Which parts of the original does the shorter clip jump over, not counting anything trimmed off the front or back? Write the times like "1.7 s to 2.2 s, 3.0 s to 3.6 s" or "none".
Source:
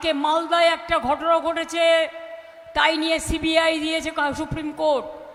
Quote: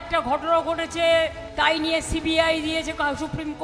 2.2 s to 2.6 s

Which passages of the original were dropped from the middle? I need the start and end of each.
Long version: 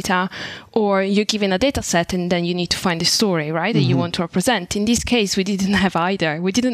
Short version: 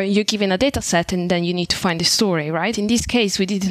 3.7 s to 4.7 s

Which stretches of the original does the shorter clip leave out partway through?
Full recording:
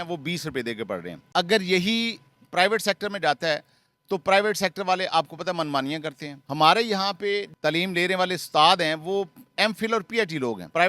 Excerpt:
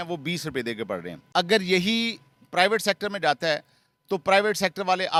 none

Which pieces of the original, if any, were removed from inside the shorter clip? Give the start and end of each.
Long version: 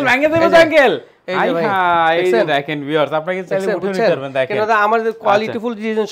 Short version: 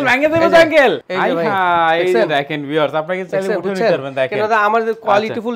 1.1 s to 1.3 s

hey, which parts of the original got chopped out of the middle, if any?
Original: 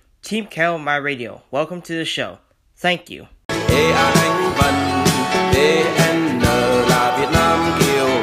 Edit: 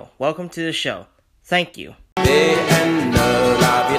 3.5 s to 5.4 s

